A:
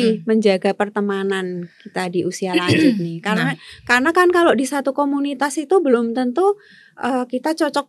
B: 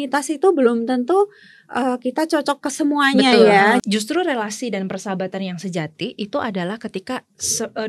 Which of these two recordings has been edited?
B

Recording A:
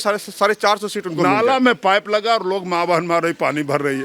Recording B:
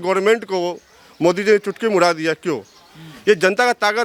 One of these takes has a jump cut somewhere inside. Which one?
A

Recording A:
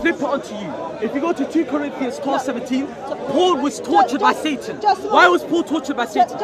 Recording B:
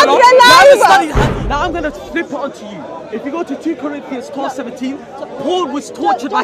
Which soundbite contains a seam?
B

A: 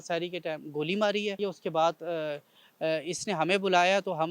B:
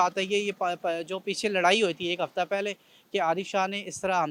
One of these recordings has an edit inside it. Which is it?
A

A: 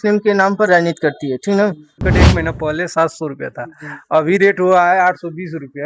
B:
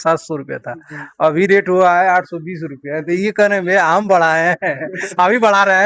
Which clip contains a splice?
A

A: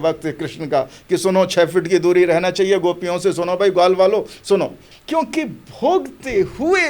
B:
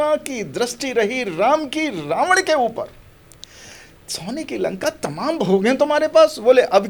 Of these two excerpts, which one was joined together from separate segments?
A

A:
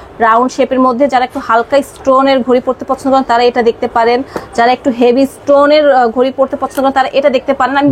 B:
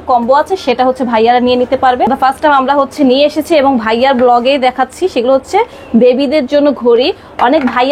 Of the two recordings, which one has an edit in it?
B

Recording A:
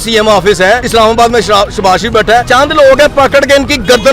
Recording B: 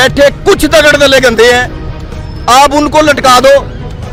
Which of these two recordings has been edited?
A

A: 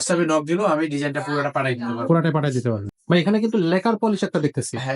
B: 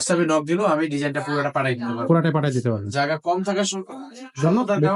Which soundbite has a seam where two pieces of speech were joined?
A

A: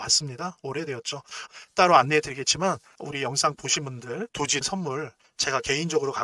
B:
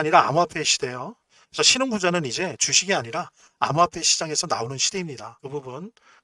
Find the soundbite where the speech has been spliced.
A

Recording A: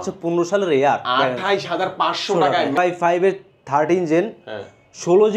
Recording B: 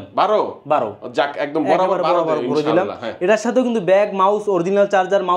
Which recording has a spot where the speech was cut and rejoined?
A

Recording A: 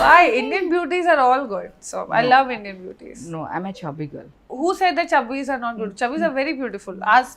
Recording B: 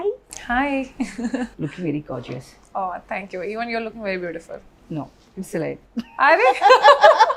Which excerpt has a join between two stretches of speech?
A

